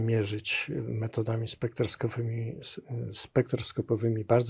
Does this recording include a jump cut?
no; 0 cuts

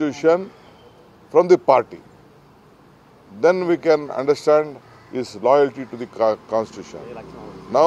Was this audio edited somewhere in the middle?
no; 0 cuts

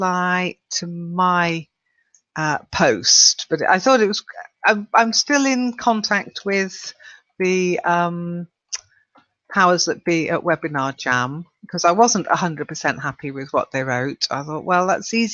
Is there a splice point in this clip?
yes; 1 cut; at 12.1 s

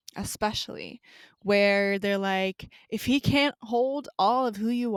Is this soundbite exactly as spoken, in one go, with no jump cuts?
yes; 0 cuts

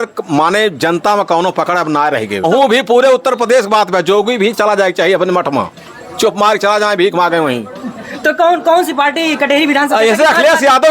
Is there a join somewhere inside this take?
yes; 1 cut; at 2.4 s

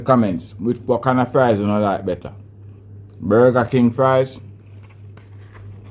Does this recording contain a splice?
no; 0 cuts

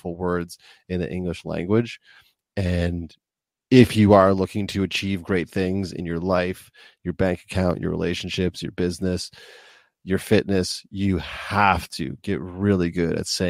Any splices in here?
no; 0 cuts

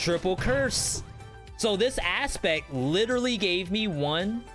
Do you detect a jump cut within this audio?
no; 0 cuts

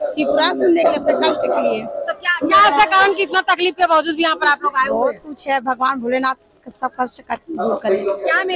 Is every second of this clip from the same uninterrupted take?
yes; 0 cuts

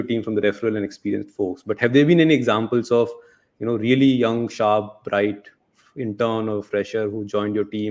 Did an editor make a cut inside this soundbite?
no; 0 cuts

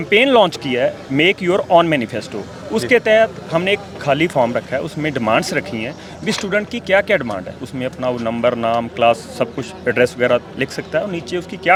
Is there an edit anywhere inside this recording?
no; 0 cuts

